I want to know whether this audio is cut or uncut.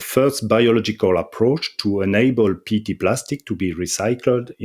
uncut